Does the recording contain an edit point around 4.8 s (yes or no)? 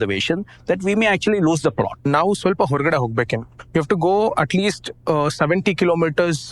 no